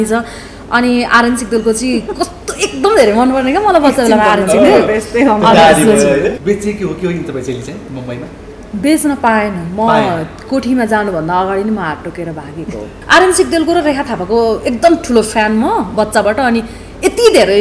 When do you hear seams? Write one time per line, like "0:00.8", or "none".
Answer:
0:06.4
0:12.9